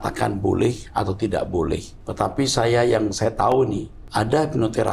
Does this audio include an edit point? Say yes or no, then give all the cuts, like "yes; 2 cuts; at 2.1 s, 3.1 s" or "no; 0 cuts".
yes; 2 cuts; at 2.0 s, 4.0 s